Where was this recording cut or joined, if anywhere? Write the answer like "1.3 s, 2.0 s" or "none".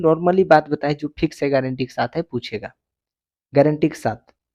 none